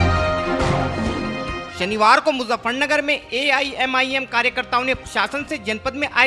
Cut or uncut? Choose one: uncut